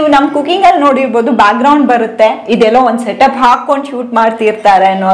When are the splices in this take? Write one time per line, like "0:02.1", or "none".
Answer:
none

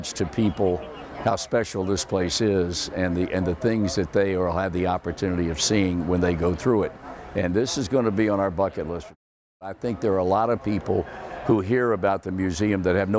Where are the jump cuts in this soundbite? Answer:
0:09.0

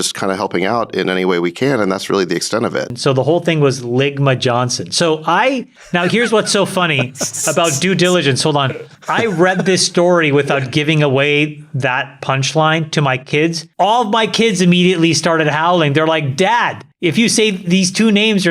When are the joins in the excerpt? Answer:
0:02.9
0:05.7

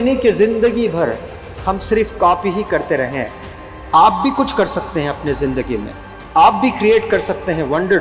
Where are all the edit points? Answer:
none

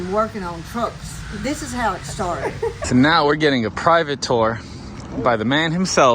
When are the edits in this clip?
0:02.8

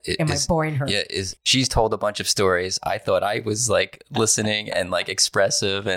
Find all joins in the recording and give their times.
0:01.4

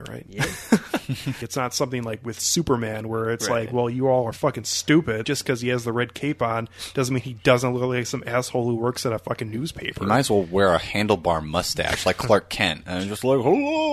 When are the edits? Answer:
0:01.4
0:05.2

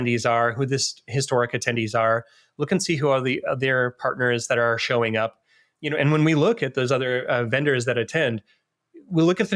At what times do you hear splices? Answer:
none

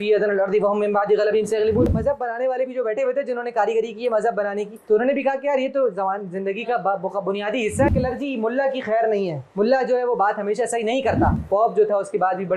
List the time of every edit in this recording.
0:01.9
0:07.9
0:11.4

